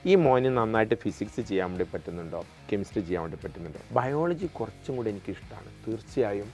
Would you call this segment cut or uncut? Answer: cut